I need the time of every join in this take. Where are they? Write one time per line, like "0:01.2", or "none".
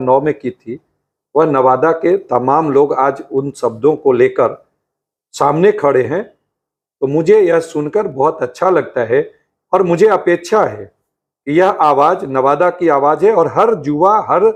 none